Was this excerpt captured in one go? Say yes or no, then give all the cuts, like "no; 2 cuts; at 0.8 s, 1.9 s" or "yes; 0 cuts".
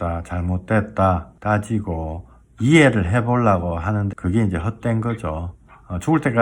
no; 2 cuts; at 1.3 s, 4.1 s